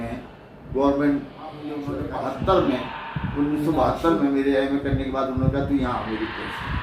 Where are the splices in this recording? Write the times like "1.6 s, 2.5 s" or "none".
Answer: 1.8 s